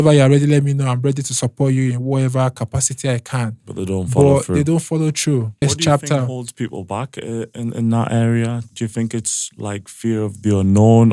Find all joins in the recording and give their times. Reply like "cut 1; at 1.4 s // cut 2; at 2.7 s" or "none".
cut 1; at 5.5 s